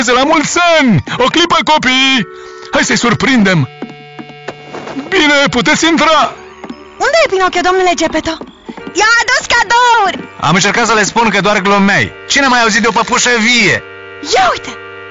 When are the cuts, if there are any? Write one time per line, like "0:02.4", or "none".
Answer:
0:08.9